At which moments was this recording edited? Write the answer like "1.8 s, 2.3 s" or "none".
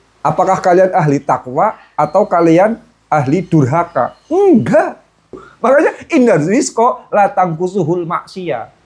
5.5 s